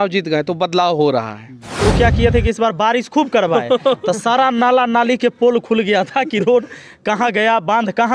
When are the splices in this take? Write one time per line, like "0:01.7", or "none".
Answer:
0:01.8